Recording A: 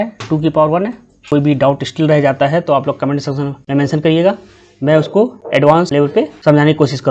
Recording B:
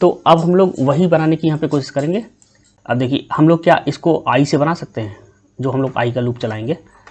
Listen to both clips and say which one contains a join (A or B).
A